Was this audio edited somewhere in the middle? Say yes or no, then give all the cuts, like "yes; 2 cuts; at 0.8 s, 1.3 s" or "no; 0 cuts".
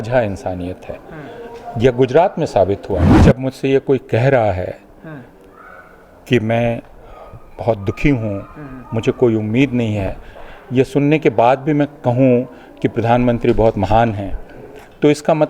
yes; 1 cut; at 3.1 s